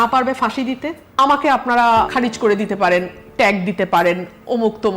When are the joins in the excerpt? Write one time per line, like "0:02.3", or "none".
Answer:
0:01.0
0:02.1